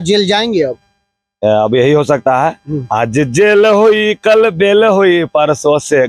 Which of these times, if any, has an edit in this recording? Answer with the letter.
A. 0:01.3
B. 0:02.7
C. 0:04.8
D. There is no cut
D